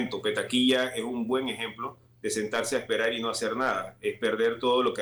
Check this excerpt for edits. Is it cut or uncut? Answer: uncut